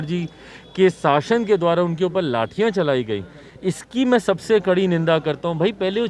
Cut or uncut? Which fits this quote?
uncut